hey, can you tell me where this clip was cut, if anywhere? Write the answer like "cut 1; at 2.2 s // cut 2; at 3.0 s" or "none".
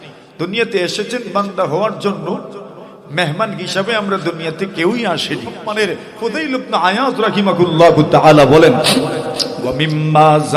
cut 1; at 5.6 s